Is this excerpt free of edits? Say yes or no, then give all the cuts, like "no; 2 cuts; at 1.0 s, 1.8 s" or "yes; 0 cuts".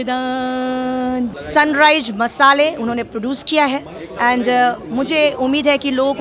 no; 1 cut; at 1.3 s